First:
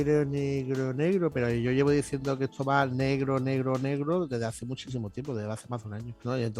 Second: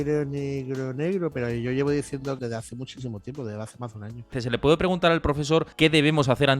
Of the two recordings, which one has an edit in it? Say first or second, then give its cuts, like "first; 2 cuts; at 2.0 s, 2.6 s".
second; 2 cuts; at 2.4 s, 4.4 s